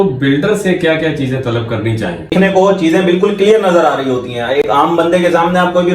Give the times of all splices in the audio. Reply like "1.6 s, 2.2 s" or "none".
2.3 s